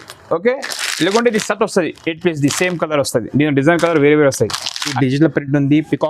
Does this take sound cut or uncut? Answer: cut